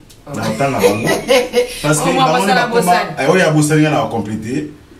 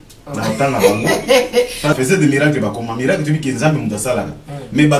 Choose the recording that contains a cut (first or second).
second